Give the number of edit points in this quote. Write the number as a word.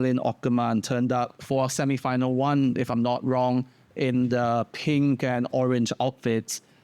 zero